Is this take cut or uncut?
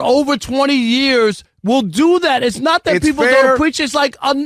cut